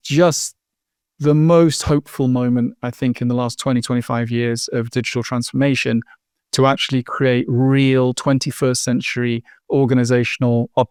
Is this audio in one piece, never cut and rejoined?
yes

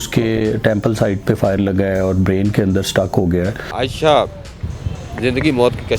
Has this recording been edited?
yes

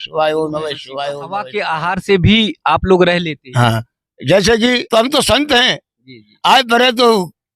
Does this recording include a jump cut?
yes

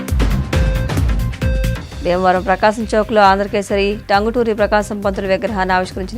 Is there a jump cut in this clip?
yes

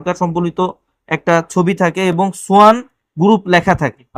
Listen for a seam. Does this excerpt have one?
no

